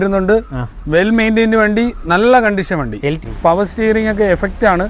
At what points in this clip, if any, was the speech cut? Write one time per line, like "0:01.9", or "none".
0:03.2